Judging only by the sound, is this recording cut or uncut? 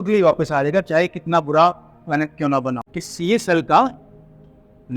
cut